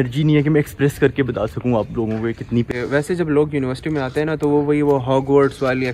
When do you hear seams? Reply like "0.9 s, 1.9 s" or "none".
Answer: 2.7 s